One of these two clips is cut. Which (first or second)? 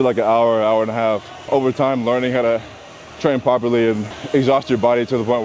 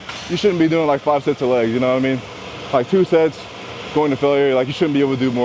first